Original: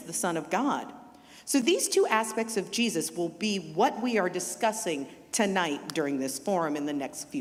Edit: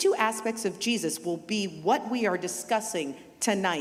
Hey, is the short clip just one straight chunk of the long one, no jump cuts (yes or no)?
yes